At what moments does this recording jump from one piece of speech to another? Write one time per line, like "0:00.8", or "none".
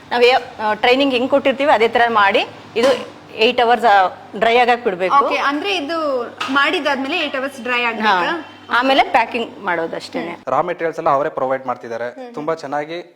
0:10.4